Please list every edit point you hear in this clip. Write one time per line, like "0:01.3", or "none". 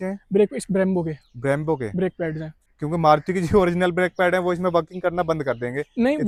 none